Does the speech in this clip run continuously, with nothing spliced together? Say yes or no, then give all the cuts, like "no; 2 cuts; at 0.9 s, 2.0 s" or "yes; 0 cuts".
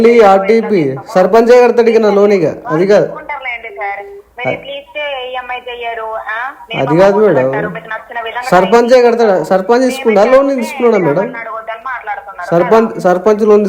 yes; 0 cuts